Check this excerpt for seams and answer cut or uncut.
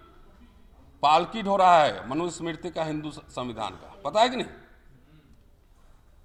uncut